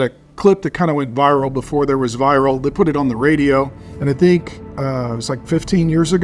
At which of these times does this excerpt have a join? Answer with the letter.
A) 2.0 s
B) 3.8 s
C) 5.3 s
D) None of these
B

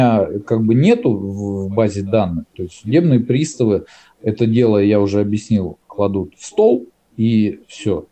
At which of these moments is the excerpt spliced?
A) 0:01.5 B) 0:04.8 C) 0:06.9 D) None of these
D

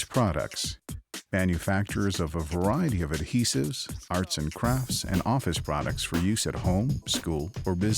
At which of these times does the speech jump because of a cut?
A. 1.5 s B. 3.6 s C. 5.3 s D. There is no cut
D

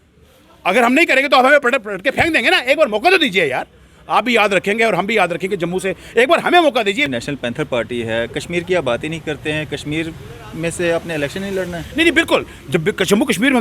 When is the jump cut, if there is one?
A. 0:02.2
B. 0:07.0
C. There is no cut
B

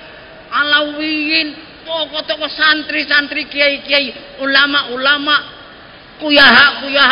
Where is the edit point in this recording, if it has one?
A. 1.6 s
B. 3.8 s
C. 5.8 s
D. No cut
D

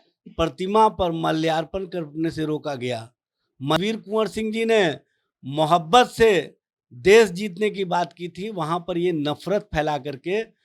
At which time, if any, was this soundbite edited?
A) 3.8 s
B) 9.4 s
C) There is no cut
A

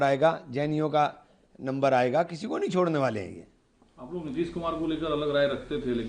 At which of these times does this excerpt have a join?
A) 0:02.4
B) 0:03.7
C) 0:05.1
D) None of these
D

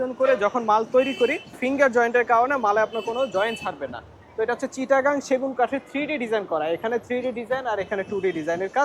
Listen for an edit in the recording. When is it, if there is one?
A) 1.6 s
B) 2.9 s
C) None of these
A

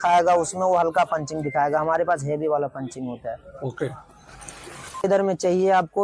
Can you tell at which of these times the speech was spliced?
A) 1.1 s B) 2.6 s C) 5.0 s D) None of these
C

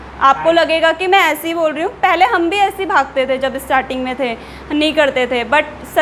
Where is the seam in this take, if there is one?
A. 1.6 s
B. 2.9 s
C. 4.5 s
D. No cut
D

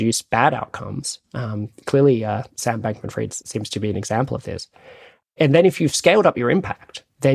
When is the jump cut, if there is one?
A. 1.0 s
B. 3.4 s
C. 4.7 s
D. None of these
B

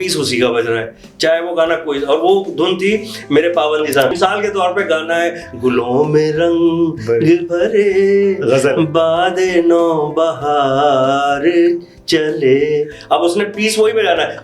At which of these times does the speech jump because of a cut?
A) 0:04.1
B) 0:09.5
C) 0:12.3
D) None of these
A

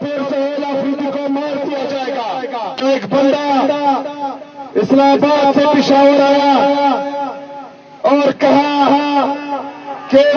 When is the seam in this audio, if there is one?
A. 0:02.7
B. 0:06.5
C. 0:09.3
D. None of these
A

